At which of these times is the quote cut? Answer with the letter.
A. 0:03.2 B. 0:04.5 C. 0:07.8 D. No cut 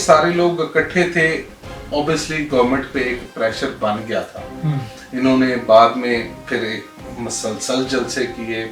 D